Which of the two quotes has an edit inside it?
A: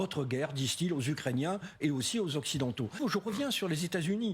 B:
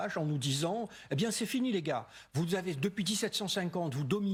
A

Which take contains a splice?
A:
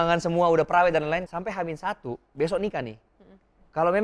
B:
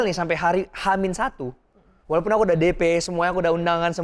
A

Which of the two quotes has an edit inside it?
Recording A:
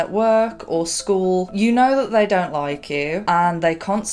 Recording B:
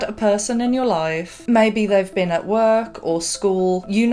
A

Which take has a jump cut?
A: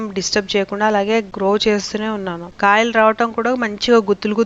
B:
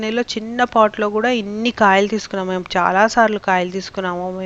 A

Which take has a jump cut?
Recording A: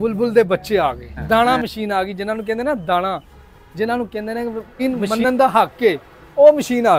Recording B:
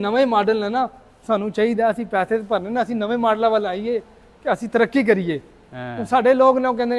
A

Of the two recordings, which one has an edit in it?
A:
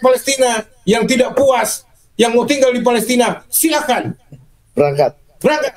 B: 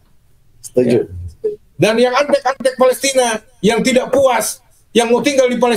B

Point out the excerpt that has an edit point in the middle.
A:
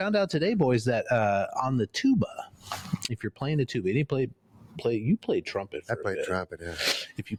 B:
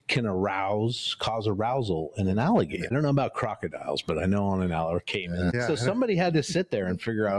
B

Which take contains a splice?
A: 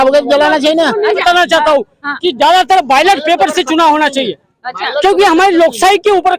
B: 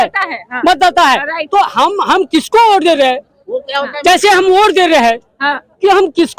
A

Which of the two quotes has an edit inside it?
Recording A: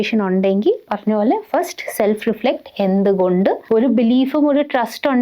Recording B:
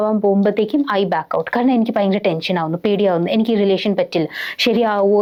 A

